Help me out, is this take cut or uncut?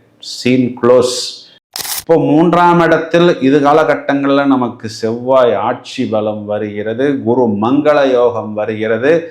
cut